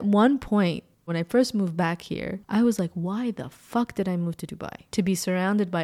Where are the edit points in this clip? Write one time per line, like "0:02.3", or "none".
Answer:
0:01.1
0:04.9

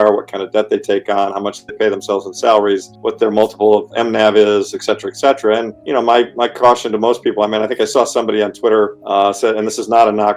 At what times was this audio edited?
0:02.9
0:05.8
0:09.0

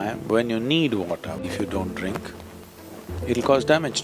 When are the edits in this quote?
0:01.4

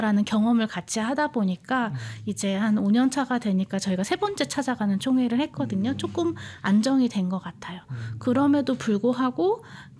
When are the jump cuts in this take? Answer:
none

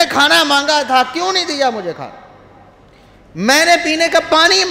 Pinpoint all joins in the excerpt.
none

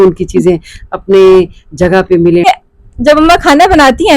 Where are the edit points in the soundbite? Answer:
0:02.4

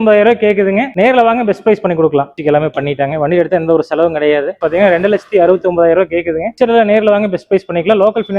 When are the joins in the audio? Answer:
0:02.3
0:04.5

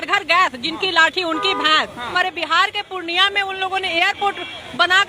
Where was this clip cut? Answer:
0:02.1

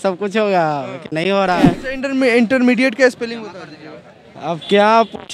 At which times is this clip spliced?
0:01.6

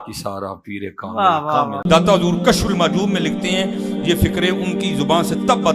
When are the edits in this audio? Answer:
0:01.8

